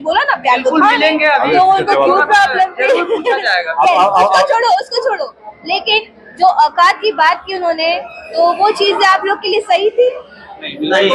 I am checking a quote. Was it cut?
no; 0 cuts

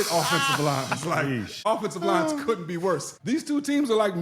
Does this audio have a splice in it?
yes; 2 cuts; at 1.6 s, 3.1 s

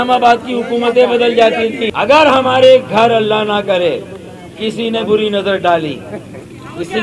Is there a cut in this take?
yes; 1 cut; at 1.9 s

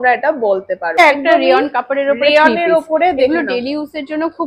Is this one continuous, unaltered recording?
no; 1 cut; at 1.0 s

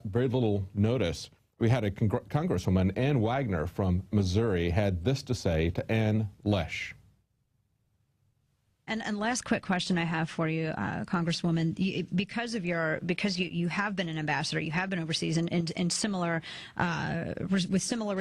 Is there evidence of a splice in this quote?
yes; 1 cut; at 13.5 s

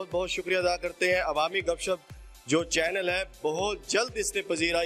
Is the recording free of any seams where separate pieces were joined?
yes; 0 cuts

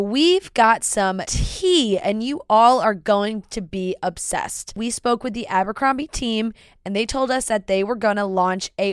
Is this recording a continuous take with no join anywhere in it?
yes; 0 cuts

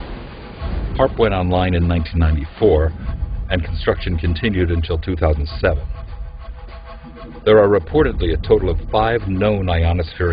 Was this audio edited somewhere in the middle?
yes; 1 cut; at 8.1 s

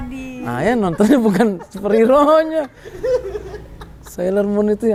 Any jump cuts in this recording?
no; 0 cuts

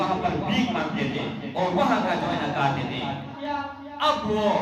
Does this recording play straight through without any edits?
no; 1 cut; at 3.4 s

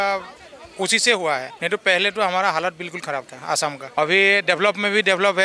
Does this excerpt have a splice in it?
yes; 2 cuts; at 1.5 s, 3.8 s

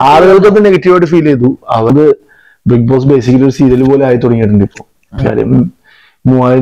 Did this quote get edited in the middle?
yes; 1 cut; at 1.9 s

